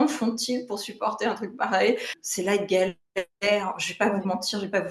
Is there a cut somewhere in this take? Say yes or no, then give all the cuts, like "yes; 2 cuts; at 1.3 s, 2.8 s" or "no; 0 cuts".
yes; 1 cut; at 2.1 s